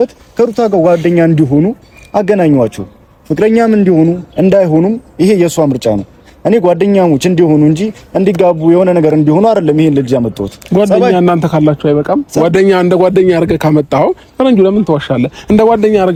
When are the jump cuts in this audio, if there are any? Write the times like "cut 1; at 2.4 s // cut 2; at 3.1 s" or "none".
none